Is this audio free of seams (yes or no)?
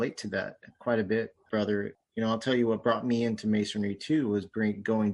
no